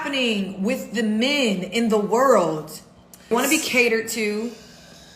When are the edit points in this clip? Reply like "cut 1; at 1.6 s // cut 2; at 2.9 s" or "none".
cut 1; at 3.3 s

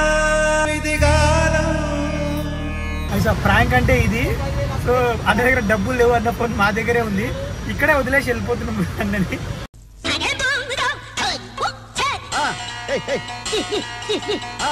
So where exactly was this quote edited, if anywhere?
cut 1; at 3.0 s // cut 2; at 9.7 s

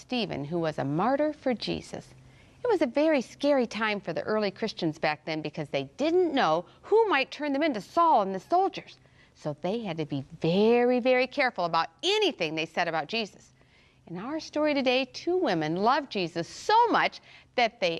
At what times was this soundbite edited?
cut 1; at 6.4 s

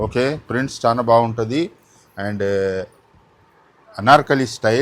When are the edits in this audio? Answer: none

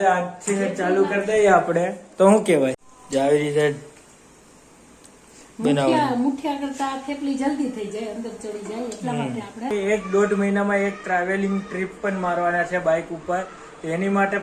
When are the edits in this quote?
cut 1; at 2.9 s // cut 2; at 9.7 s

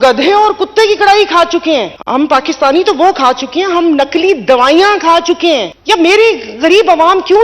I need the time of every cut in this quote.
cut 1; at 2.0 s // cut 2; at 5.7 s

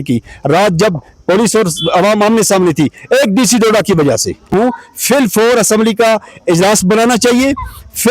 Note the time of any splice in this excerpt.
cut 1; at 4.5 s

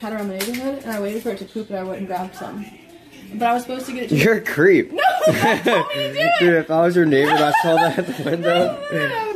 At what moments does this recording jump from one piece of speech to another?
none

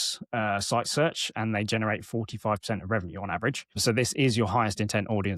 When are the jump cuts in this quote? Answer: none

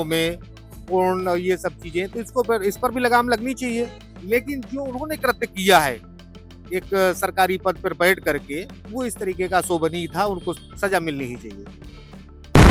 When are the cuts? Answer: none

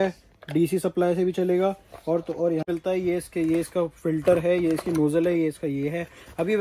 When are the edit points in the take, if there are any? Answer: cut 1; at 2.7 s

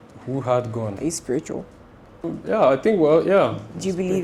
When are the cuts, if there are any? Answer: cut 1; at 1.0 s // cut 2; at 2.2 s

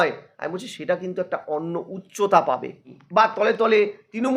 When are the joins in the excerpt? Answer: cut 1; at 2.9 s

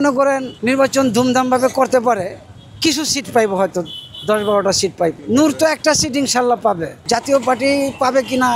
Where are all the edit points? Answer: none

